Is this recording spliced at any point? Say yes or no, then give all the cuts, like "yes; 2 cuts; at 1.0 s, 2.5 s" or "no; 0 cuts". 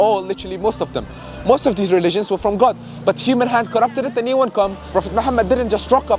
yes; 1 cut; at 4.8 s